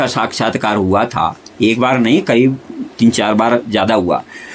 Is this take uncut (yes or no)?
yes